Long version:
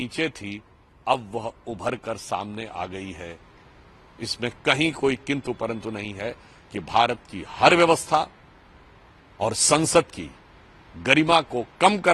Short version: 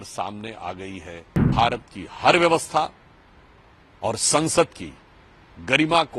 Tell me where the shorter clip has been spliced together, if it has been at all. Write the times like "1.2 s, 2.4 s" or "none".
1.5 s